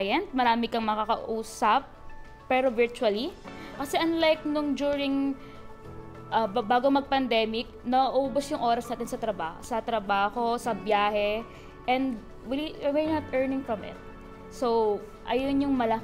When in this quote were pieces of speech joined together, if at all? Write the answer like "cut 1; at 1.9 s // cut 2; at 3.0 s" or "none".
cut 1; at 3.8 s